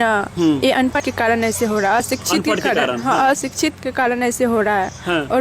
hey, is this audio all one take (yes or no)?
no